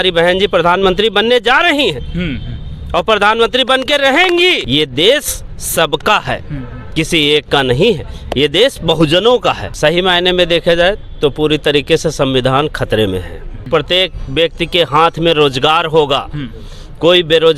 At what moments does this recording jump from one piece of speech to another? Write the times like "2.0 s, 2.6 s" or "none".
4.6 s, 9.7 s, 13.7 s

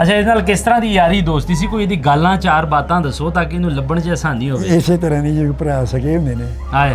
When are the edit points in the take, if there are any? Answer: none

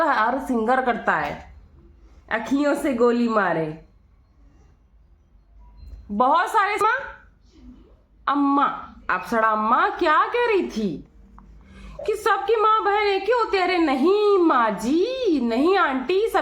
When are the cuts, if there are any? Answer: 6.8 s

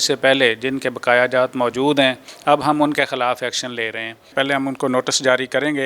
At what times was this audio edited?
2.3 s, 4.3 s

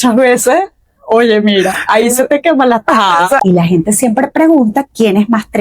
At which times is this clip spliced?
3.4 s

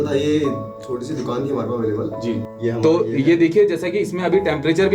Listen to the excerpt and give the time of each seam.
2.5 s

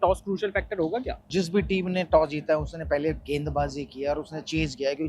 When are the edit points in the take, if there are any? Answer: 1.3 s

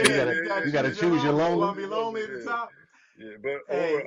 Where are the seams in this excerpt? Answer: none

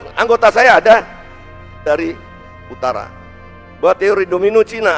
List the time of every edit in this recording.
1.8 s

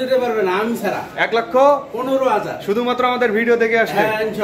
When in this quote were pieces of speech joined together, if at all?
none

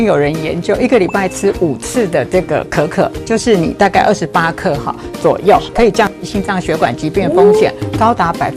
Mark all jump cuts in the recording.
none

